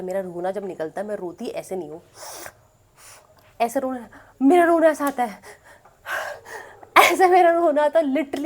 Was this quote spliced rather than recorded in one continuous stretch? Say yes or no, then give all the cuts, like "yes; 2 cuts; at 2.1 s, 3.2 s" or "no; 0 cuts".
no; 0 cuts